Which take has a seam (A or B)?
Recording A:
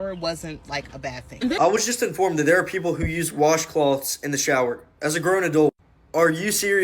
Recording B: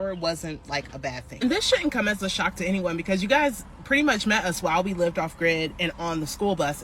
A